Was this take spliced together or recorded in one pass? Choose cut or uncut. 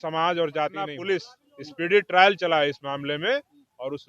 cut